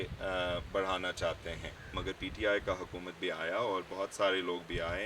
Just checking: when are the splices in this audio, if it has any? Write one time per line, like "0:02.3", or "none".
0:02.0